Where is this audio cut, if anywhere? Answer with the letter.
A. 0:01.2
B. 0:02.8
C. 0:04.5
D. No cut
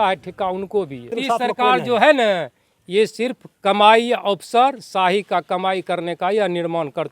A